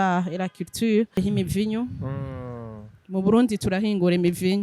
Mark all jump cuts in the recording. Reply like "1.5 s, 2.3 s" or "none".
1.2 s